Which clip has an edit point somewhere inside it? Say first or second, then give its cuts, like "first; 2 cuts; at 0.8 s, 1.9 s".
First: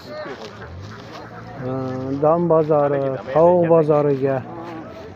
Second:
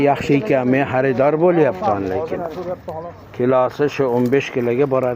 second; 1 cut; at 1.6 s